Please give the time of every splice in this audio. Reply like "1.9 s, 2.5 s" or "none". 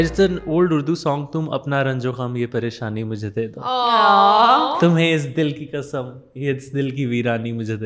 none